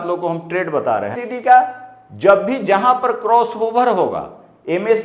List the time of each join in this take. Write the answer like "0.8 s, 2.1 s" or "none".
1.3 s